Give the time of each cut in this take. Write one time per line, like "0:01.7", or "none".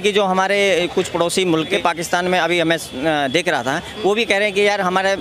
0:01.7